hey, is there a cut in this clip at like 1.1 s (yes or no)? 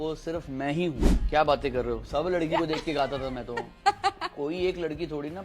yes